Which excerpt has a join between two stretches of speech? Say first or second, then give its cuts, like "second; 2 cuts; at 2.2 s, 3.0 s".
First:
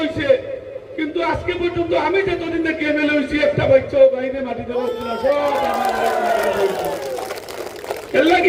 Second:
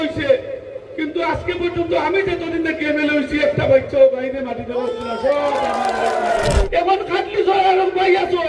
second; 1 cut; at 6.6 s